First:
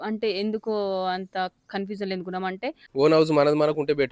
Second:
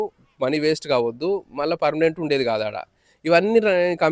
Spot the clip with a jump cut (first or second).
first